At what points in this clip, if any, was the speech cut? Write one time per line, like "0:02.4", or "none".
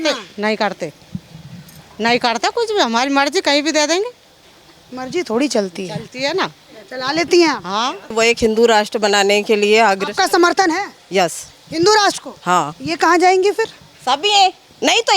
0:08.1
0:12.8